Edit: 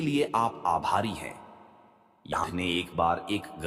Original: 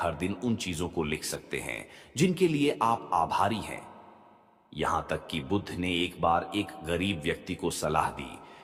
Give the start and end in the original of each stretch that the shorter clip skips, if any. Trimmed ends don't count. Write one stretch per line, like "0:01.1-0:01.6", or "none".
0:04.8-0:05.6